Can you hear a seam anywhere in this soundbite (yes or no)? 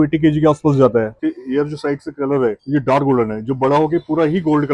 yes